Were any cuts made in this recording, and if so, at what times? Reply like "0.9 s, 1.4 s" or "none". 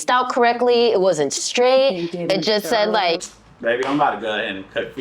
3.2 s